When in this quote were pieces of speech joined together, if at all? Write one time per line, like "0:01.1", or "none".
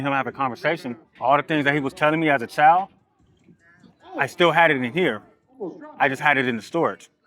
0:01.1

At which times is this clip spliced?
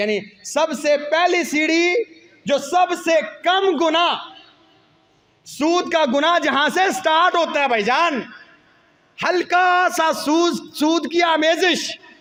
none

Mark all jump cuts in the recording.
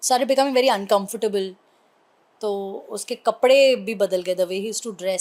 none

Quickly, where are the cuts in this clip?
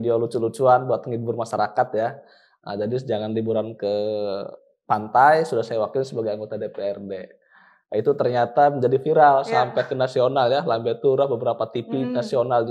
none

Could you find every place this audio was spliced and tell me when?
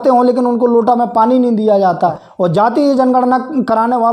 0:02.2

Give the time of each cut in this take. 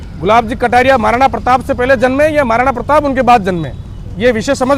none

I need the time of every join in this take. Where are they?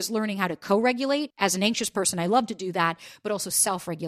0:01.3

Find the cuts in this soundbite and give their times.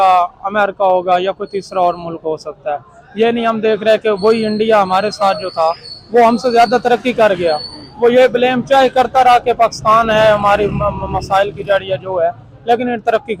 none

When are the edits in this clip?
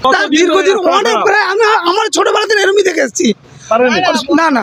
none

